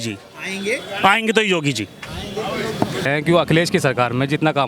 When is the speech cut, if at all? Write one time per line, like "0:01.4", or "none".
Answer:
0:02.9